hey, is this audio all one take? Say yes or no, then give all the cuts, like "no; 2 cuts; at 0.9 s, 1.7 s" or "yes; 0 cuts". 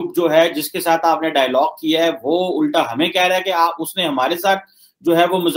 yes; 0 cuts